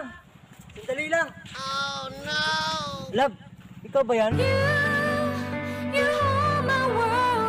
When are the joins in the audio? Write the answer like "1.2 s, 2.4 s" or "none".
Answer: none